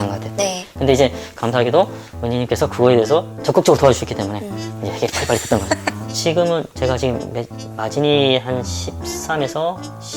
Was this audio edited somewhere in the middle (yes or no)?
yes